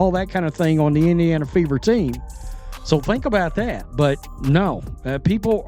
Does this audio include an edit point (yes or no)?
yes